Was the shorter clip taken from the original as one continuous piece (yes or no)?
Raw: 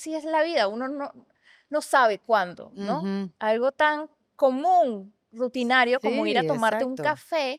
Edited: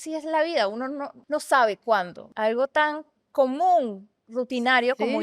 no